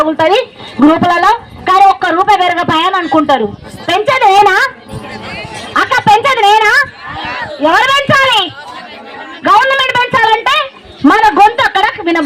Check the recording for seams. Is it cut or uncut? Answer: uncut